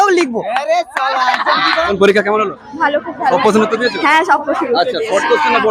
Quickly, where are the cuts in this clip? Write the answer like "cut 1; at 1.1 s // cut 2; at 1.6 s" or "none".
cut 1; at 1.8 s